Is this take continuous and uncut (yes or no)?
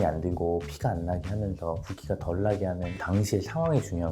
no